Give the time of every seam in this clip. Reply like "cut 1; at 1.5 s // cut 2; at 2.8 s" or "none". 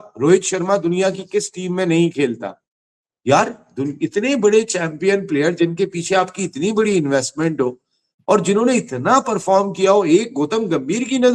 none